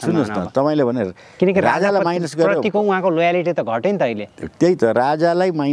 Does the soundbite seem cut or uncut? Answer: uncut